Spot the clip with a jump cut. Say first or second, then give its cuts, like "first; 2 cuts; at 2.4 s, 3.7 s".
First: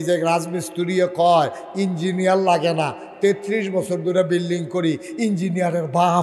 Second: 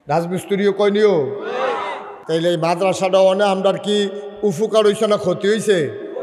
second; 1 cut; at 2.1 s